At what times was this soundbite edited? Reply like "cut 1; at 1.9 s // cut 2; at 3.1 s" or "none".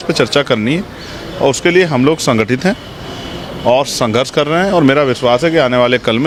none